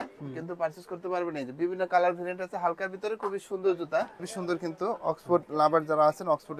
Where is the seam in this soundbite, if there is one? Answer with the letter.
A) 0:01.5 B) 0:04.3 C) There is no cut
B